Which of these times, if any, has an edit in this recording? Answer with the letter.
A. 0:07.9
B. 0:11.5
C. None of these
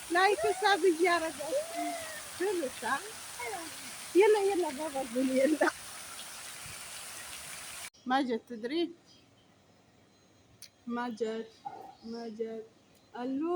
A